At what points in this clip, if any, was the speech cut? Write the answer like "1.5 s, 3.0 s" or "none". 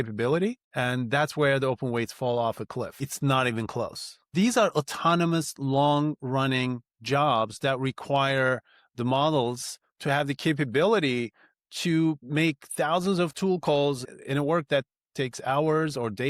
3.0 s, 4.3 s, 12.2 s, 14.0 s